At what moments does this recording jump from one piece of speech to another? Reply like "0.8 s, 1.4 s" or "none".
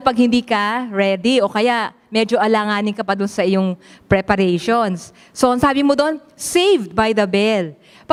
none